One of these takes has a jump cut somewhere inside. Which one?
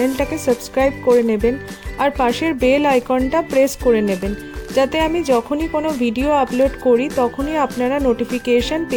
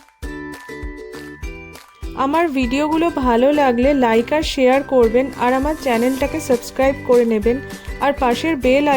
second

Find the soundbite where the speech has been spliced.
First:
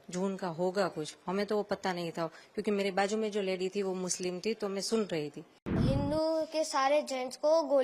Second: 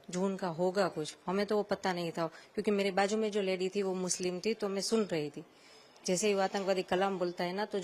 first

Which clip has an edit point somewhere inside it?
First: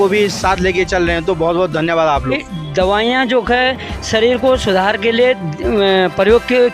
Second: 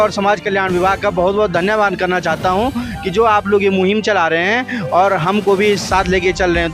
first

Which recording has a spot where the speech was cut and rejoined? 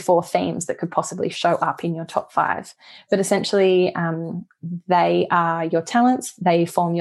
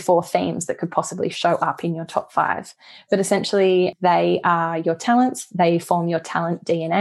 second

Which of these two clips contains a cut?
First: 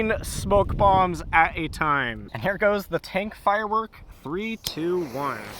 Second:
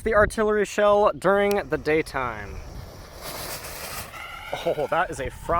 first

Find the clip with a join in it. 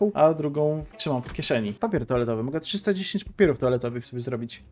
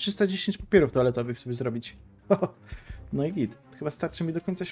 first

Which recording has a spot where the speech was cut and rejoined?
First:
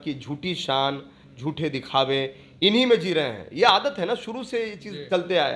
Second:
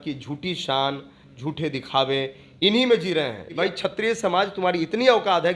second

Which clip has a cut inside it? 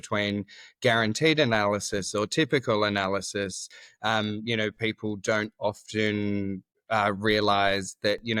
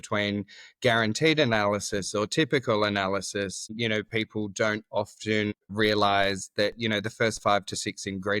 second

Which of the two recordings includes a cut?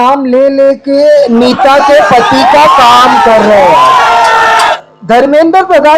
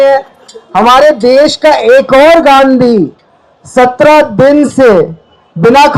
first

